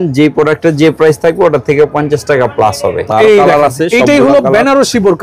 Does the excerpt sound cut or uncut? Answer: cut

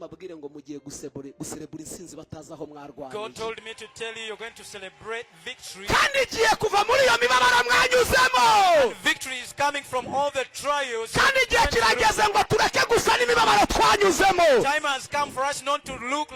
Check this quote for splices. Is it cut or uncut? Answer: uncut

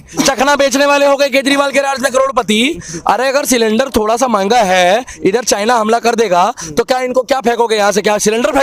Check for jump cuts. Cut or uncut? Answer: uncut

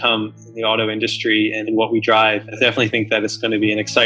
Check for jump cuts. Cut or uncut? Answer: cut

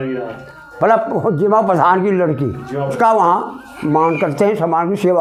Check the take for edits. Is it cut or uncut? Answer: cut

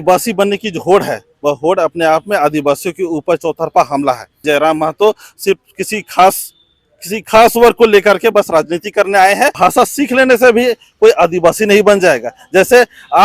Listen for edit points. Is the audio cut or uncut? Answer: cut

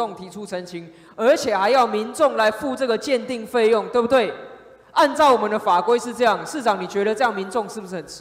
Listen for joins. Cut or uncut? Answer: uncut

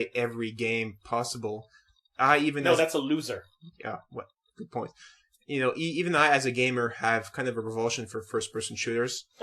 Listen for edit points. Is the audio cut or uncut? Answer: cut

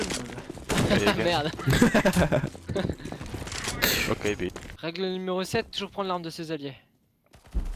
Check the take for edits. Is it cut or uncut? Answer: cut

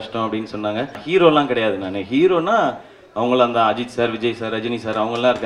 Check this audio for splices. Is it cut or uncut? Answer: cut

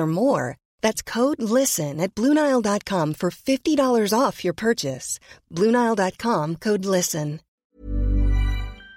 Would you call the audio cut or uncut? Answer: cut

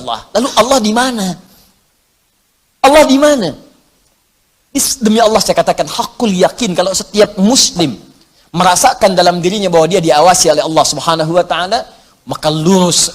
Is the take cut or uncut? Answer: uncut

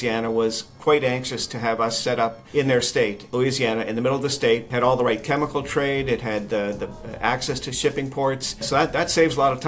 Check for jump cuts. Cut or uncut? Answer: cut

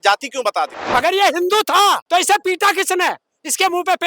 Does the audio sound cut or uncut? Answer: cut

